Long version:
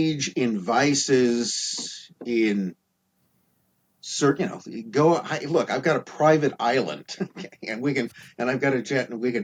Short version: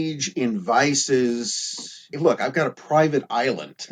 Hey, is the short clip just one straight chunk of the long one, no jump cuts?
no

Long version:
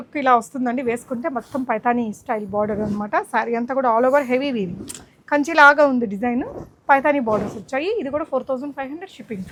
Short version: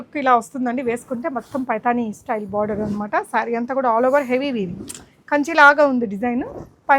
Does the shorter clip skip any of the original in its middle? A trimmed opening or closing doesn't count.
no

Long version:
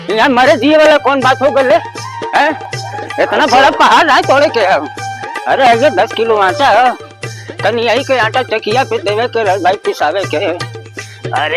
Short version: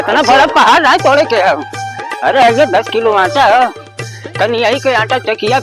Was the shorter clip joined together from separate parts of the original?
no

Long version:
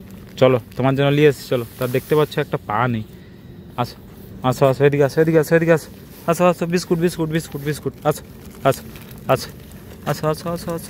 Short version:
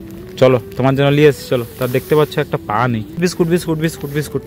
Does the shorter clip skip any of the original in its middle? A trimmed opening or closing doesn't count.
yes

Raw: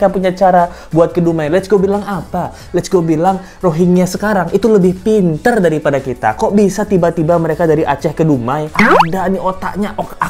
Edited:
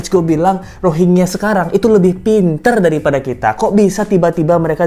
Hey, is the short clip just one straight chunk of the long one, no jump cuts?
yes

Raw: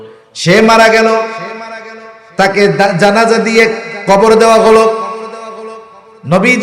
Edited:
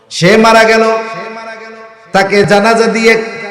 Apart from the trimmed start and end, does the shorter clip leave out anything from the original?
yes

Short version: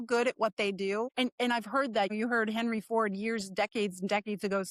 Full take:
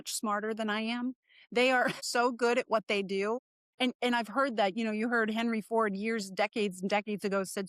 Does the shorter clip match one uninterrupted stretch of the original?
no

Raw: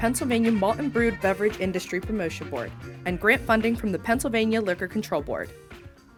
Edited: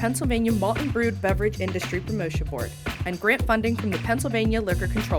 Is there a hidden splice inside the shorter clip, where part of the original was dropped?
no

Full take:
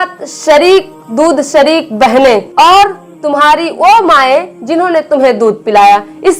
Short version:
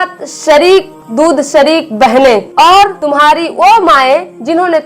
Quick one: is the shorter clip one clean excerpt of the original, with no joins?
no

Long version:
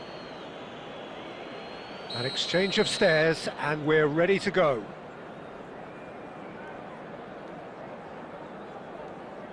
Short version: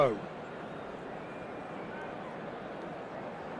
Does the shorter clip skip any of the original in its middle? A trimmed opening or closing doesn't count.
no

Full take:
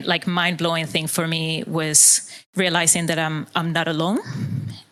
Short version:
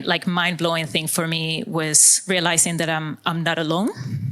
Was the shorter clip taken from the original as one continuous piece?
no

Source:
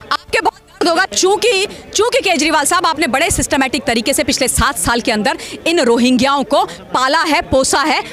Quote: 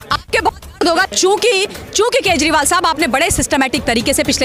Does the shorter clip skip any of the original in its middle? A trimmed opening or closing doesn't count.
no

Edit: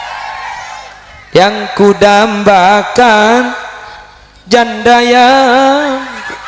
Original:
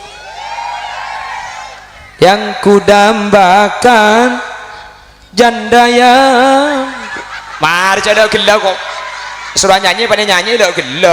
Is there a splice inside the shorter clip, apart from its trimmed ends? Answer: no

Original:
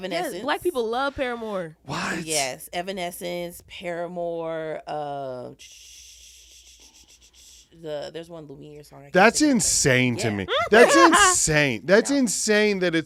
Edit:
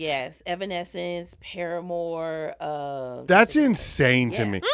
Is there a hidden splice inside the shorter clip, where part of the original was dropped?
yes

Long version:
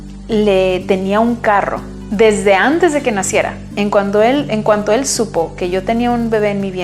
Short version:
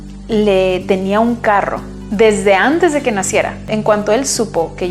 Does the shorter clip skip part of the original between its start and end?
yes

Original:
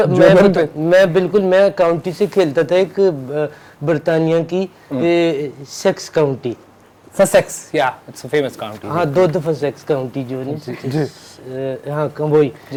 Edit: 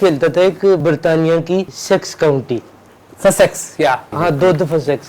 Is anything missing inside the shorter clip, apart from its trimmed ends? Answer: yes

